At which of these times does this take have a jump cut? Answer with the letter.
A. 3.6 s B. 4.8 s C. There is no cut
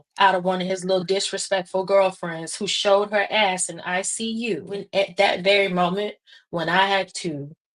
B